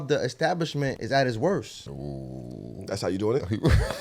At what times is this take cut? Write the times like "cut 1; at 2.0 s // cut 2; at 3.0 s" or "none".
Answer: cut 1; at 1.0 s // cut 2; at 1.9 s